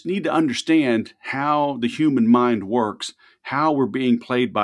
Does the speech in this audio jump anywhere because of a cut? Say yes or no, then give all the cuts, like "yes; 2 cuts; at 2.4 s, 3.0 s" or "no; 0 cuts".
no; 0 cuts